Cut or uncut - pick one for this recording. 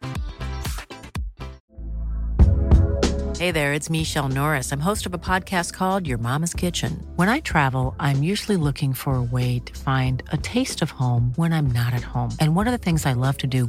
cut